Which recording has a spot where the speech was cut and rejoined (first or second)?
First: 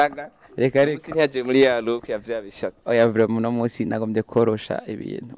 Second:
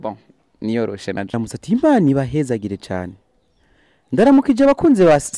second